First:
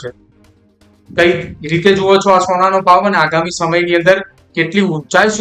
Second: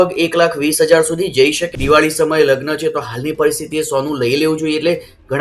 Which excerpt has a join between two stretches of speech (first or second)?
second